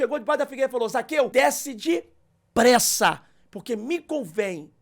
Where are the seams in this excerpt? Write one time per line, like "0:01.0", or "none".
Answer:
0:01.3